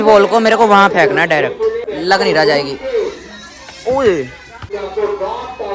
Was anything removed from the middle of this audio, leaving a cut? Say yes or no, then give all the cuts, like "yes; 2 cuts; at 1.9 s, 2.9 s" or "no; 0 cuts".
yes; 2 cuts; at 1.9 s, 4.7 s